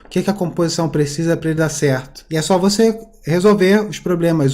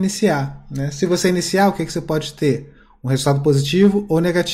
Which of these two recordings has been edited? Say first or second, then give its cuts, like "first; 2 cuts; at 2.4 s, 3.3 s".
first; 1 cut; at 2.1 s